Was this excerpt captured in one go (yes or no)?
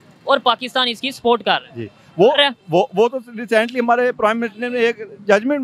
yes